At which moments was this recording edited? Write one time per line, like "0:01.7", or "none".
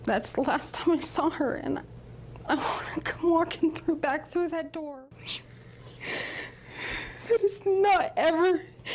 0:04.9